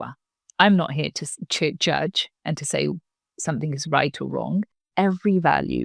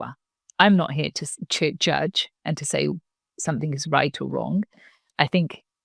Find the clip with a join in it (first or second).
first